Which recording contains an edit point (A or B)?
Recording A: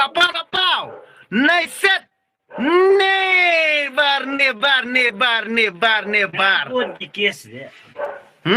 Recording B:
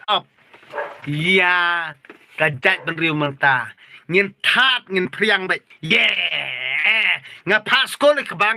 B